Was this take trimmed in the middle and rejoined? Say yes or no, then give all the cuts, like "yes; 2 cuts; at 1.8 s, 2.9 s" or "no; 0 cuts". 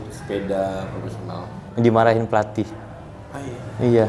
no; 0 cuts